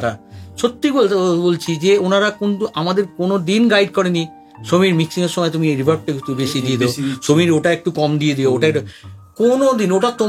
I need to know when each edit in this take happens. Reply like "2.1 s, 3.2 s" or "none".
none